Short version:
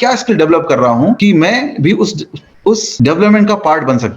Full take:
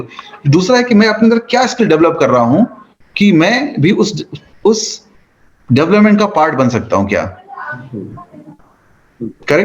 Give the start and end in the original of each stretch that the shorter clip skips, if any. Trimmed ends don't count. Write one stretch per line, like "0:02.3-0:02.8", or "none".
0:02.7-0:03.2
0:04.9-0:05.6